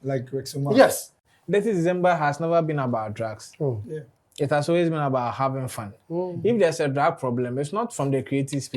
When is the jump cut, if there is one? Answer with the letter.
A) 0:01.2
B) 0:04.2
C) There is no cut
A